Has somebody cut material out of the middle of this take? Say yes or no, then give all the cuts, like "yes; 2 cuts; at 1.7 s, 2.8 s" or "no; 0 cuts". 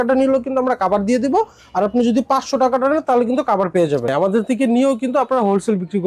yes; 1 cut; at 4.1 s